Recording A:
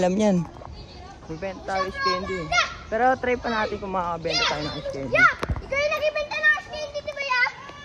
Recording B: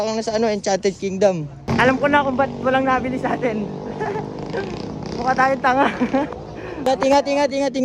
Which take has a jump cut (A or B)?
B